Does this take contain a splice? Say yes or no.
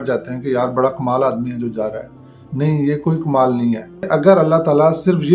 yes